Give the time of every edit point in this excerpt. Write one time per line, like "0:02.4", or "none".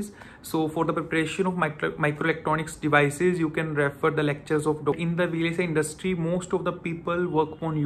0:05.0